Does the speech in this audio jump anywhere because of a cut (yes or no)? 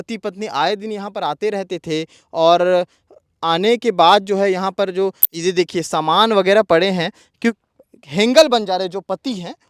yes